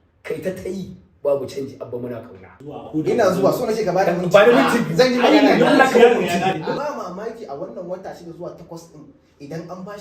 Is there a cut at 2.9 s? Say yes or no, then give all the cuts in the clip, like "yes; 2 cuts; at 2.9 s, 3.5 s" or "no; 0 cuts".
yes; 2 cuts; at 2.9 s, 6.7 s